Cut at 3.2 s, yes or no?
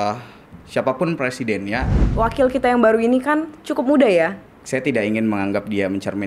no